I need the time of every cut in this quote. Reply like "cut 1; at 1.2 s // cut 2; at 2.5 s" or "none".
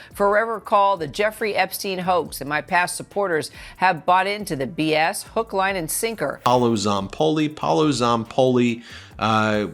cut 1; at 6.4 s